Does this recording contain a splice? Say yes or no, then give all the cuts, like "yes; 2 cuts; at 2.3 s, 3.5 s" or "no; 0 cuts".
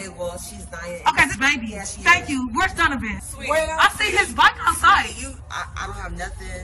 yes; 3 cuts; at 1.9 s, 3.2 s, 5.4 s